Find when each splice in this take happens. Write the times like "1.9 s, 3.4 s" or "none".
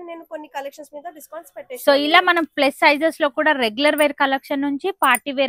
none